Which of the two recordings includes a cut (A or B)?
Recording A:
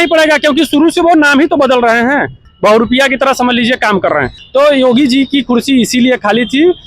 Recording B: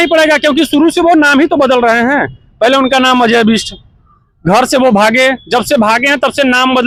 A